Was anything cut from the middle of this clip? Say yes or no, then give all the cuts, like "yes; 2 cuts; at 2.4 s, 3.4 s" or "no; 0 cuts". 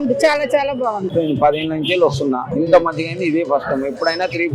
yes; 1 cut; at 1.1 s